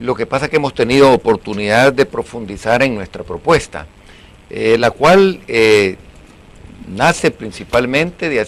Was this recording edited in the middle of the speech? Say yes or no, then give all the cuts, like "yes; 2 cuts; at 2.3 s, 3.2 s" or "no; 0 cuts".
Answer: yes; 1 cut; at 1.4 s